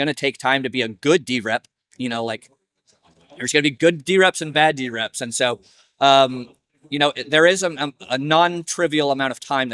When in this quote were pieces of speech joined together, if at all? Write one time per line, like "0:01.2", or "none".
none